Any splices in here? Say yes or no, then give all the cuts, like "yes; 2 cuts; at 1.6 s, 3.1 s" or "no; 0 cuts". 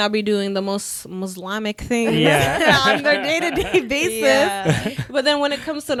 no; 0 cuts